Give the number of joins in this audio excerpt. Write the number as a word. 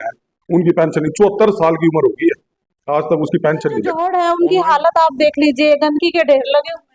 one